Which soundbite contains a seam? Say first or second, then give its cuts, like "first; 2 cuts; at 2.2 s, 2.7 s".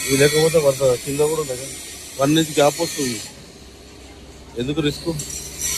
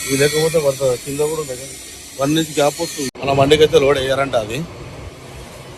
second; 1 cut; at 3.1 s